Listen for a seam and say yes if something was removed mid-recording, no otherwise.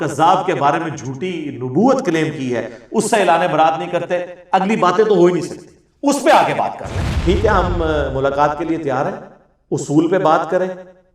yes